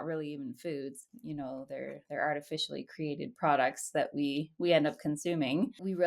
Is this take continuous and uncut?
yes; 0 cuts

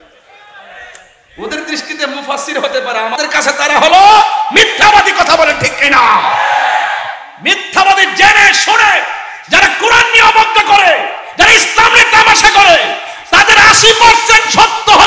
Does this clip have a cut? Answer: yes; 1 cut; at 3.2 s

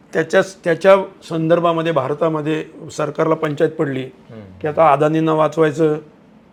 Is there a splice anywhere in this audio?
no; 0 cuts

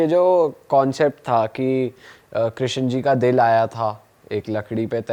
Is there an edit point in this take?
no; 0 cuts

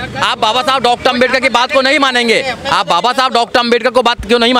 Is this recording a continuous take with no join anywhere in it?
yes; 0 cuts

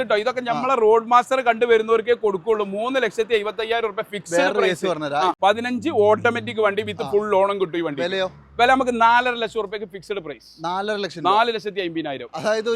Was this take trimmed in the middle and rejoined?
yes; 1 cut; at 5.4 s

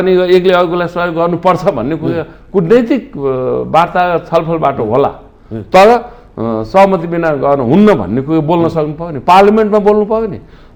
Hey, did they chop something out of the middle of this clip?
no; 0 cuts

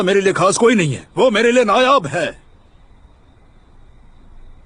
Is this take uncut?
yes; 0 cuts

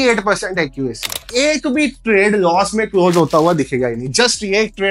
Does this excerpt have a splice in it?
yes; 1 cut; at 1.2 s

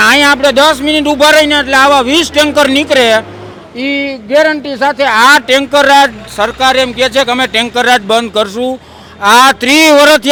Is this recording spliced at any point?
no; 0 cuts

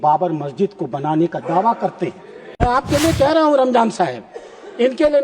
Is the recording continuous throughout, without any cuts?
no; 1 cut; at 2.6 s

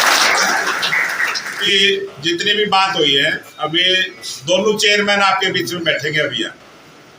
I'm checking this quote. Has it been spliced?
yes; 1 cut; at 1.6 s

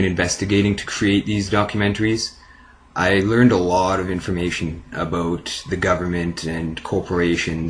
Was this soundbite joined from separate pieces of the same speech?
yes; 1 cut; at 1.8 s

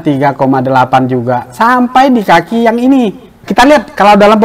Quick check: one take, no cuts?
no; 1 cut; at 3.4 s

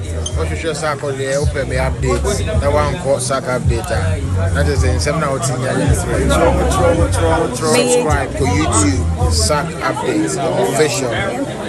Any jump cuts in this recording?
no; 0 cuts

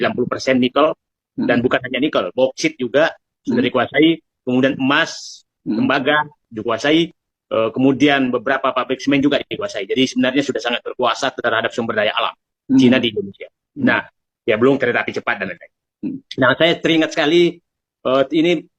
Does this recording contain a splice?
no; 0 cuts

